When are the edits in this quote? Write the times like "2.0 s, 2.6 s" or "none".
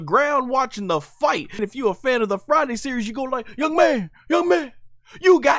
1.6 s